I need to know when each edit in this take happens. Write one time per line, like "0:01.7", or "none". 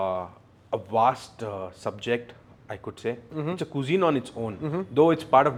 none